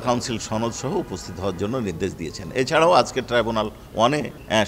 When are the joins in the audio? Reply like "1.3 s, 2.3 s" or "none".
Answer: none